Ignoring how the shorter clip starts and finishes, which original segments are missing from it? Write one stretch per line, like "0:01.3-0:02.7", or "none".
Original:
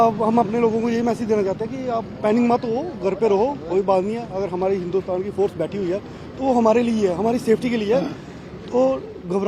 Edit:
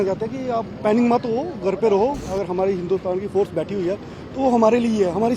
0:03.6-0:04.3